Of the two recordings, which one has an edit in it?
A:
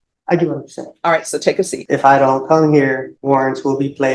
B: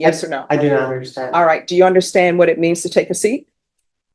A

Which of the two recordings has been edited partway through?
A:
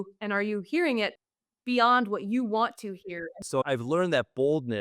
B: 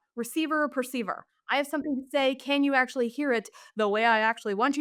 A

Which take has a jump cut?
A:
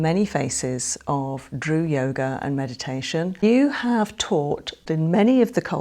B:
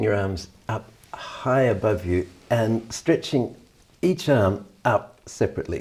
A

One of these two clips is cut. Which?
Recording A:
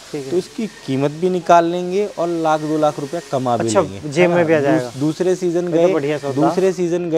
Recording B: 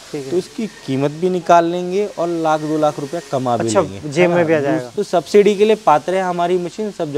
B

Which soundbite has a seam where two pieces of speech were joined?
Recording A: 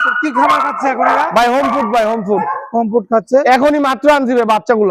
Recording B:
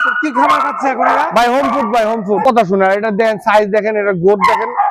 B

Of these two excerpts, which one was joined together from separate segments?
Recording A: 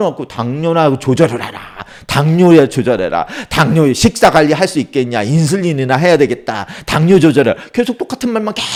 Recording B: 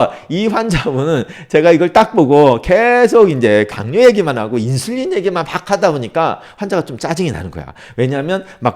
B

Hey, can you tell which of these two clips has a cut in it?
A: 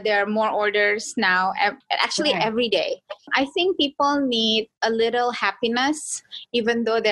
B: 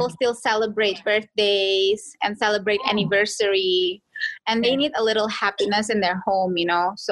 A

